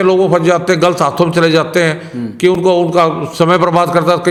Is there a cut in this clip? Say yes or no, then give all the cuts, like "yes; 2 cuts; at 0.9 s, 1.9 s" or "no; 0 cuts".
no; 0 cuts